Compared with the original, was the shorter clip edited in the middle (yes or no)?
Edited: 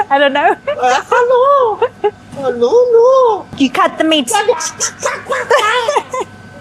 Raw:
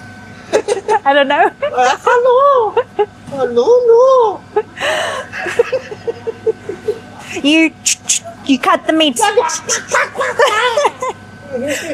yes